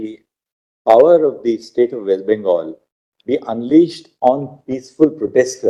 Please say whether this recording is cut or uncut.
uncut